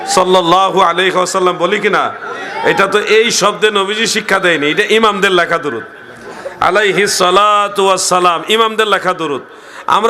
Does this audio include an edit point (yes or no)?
no